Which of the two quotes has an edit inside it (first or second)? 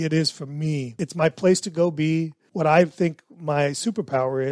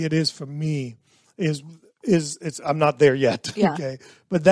first